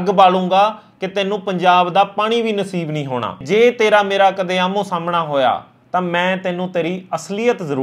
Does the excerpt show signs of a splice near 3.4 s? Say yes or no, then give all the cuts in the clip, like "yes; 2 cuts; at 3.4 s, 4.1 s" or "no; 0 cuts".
yes; 1 cut; at 3.4 s